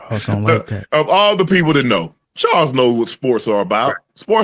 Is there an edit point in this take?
yes; 1 cut; at 2.2 s

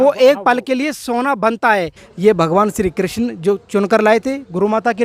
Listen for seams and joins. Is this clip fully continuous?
no; 1 cut; at 2.0 s

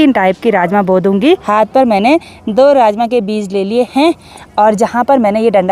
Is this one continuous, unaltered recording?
no; 1 cut; at 1.4 s

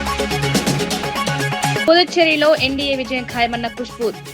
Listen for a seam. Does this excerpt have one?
yes; 1 cut; at 1.8 s

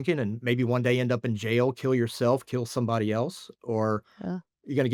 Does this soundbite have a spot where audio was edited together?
no; 0 cuts

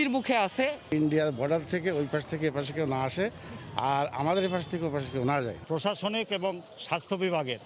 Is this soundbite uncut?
yes; 0 cuts

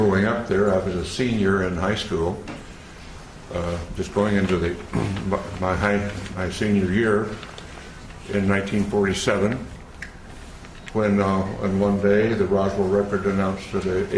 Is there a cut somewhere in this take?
yes; 1 cut; at 5.1 s

